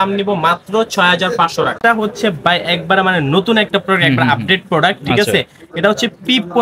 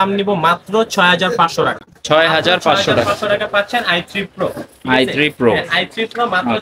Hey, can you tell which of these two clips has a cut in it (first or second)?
first